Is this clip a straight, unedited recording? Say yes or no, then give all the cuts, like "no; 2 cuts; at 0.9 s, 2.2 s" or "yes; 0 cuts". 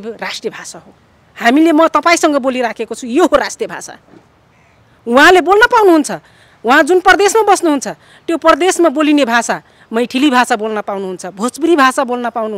yes; 0 cuts